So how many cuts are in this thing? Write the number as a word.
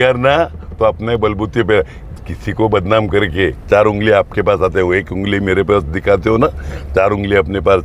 zero